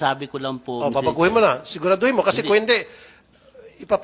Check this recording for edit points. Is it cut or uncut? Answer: uncut